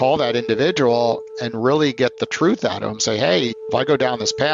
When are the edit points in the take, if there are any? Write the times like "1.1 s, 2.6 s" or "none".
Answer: 3.6 s